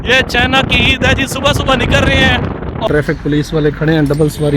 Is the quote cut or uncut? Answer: cut